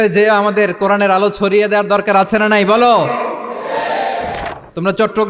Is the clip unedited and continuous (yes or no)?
no